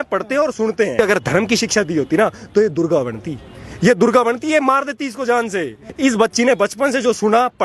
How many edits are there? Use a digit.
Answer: 2